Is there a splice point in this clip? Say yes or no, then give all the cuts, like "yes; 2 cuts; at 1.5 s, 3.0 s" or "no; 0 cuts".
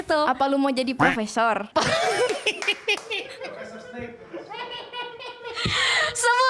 no; 0 cuts